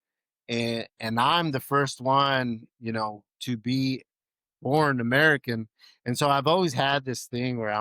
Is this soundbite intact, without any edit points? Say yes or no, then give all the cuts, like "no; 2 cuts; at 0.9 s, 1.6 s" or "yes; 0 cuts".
yes; 0 cuts